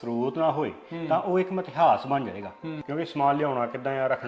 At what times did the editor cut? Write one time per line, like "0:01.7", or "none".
0:02.8

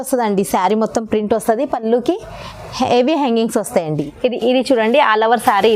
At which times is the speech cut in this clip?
0:04.1

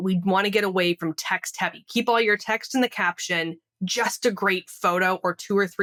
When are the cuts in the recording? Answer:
none

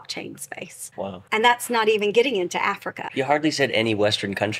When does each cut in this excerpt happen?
0:01.1
0:03.0

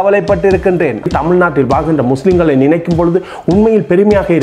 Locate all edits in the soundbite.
0:01.1

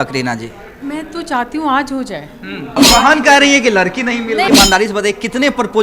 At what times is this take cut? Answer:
0:02.8
0:04.5

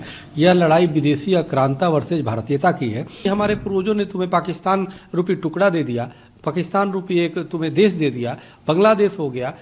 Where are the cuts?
0:03.2

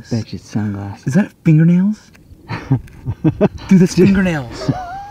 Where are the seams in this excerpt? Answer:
none

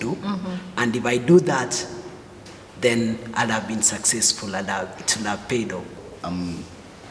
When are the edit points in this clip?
0:06.0

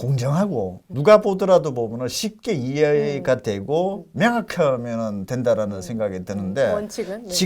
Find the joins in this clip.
0:00.9

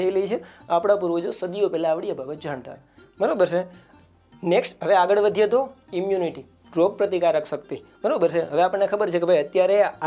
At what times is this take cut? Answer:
none

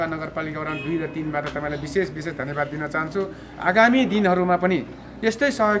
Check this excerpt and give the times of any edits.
none

